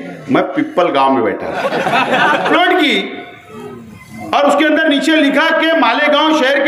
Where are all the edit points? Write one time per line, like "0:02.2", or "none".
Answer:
0:02.5